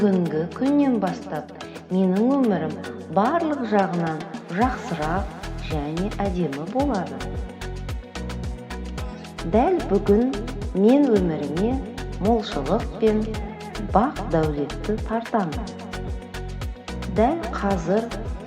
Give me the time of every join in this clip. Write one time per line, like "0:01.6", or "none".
0:07.6
0:09.2